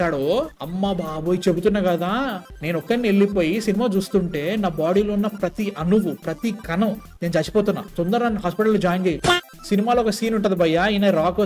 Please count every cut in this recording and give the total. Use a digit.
2